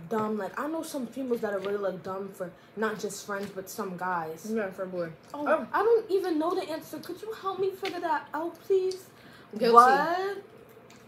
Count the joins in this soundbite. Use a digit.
0